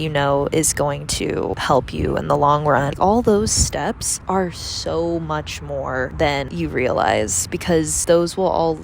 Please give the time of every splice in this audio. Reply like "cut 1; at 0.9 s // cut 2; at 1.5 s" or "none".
cut 1; at 3.0 s